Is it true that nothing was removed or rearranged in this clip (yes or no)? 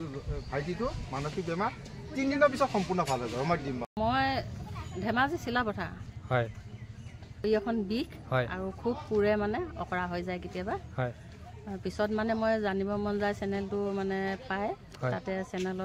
no